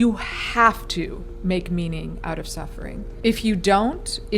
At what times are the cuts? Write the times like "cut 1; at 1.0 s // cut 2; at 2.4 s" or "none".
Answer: cut 1; at 3.1 s